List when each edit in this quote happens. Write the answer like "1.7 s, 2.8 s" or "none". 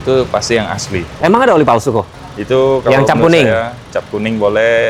2.1 s